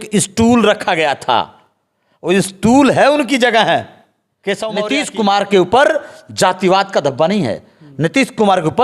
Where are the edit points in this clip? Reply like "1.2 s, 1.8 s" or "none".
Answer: 4.7 s